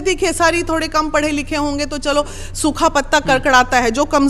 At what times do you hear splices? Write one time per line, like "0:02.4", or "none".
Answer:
none